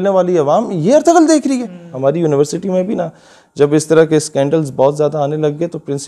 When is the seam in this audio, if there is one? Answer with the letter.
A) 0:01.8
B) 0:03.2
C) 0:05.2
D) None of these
A